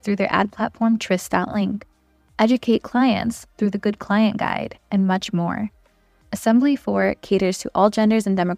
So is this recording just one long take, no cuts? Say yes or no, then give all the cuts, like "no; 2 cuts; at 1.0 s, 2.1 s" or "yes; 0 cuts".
yes; 0 cuts